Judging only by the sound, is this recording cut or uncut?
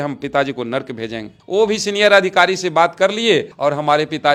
uncut